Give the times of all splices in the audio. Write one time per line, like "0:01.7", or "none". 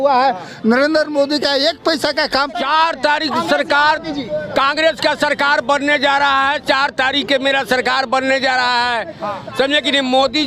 0:02.6